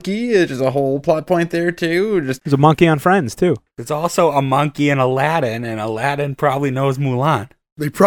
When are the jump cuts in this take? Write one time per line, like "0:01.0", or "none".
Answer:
0:02.3
0:03.7

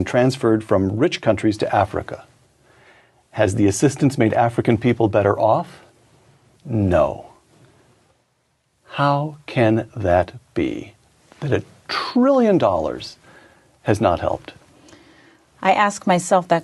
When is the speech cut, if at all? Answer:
none

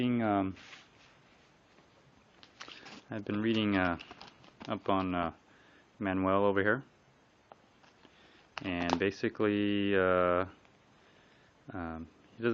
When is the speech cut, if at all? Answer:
0:07.5

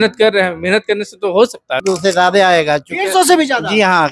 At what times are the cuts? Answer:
0:01.8

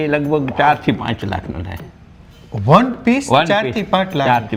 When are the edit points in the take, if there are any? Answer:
none

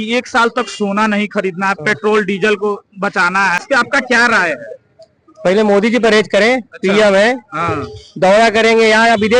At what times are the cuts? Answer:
none

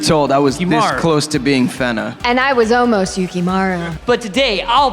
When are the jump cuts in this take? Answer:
0:02.1
0:03.9

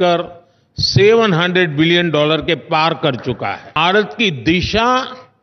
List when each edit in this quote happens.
0:03.8

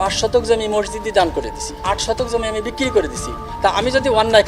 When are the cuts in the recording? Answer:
0:01.8
0:03.4

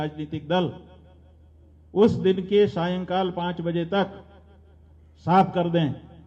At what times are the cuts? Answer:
none

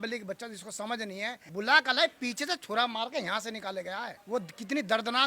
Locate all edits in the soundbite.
0:01.4
0:04.2

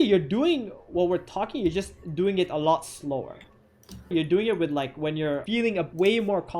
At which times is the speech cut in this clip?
0:04.1
0:05.8

